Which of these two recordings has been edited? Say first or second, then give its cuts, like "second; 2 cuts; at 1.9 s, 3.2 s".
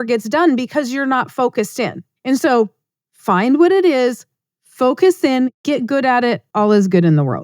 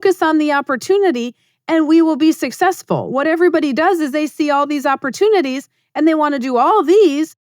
first; 2 cuts; at 2.1 s, 6.4 s